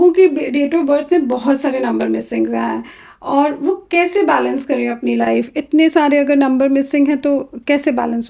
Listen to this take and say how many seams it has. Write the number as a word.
zero